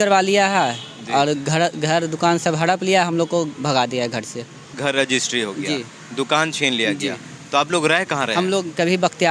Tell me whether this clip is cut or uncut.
cut